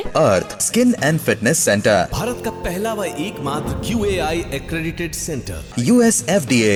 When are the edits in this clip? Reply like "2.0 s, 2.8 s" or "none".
none